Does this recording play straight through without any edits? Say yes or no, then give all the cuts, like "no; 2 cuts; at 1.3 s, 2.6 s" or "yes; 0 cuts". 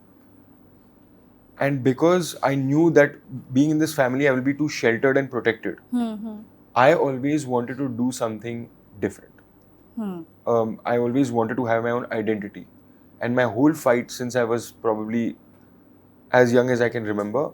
yes; 0 cuts